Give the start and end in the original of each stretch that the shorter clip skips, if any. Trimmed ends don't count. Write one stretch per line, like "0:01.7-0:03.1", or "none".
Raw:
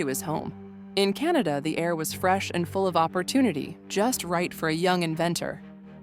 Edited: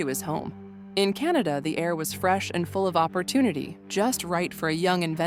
none

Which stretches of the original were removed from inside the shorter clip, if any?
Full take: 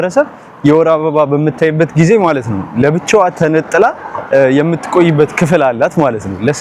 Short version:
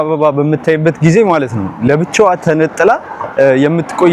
none

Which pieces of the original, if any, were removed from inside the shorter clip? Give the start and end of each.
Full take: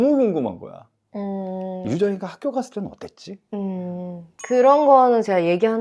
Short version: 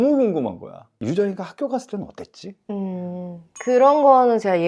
0:00.9-0:01.8

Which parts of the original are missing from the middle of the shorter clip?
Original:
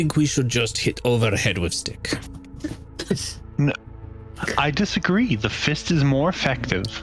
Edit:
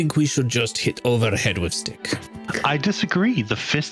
0:02.4-0:04.3

